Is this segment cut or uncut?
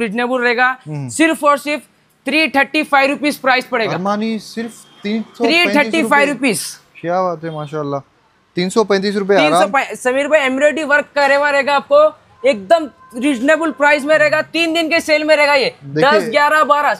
uncut